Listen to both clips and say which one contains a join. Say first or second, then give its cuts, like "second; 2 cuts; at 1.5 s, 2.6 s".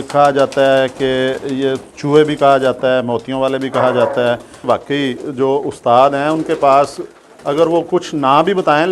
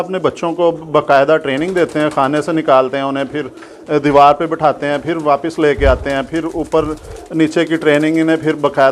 first; 1 cut; at 4.6 s